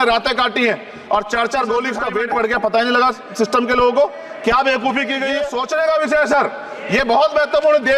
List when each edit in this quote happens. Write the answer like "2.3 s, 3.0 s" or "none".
2.0 s, 5.5 s

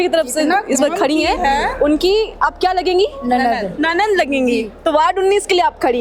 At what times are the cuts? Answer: none

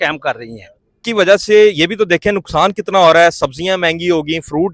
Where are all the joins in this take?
1.1 s

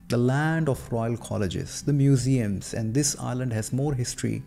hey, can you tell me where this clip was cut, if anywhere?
none

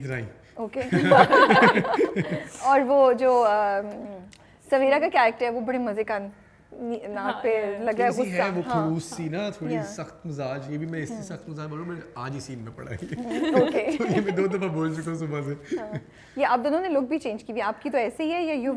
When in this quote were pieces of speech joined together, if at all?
none

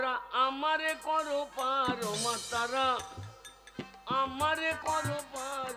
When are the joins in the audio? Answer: none

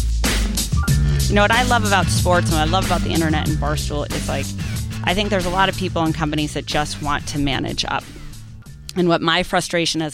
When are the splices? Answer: 1.0 s

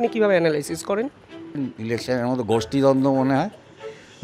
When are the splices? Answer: 1.6 s

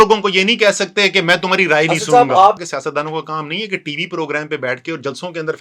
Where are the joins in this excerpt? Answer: 2.6 s

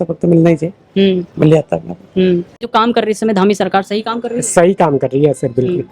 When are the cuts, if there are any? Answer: 2.7 s

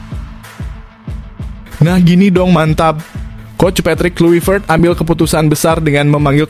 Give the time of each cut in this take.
1.8 s

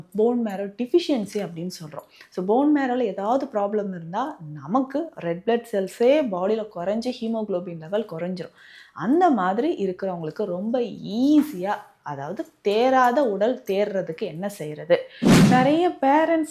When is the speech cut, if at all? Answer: 15.3 s

